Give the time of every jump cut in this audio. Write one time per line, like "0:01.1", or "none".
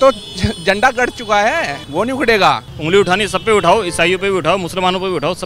0:01.8
0:02.7